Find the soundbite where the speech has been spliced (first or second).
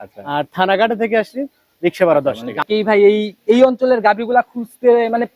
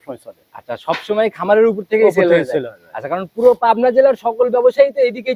first